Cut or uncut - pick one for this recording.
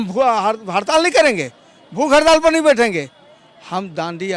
uncut